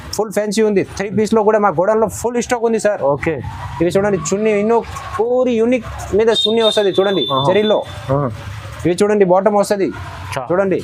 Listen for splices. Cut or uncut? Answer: uncut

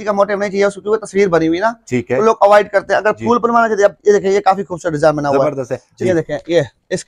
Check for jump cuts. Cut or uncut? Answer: cut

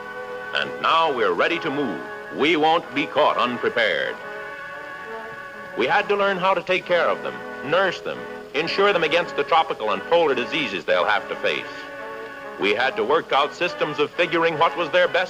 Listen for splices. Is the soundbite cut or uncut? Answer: cut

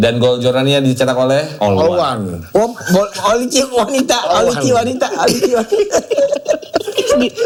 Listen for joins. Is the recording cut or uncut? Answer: uncut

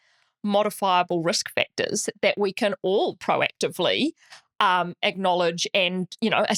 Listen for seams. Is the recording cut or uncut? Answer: uncut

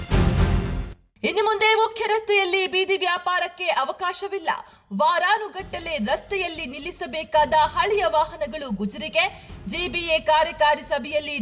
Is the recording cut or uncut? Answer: uncut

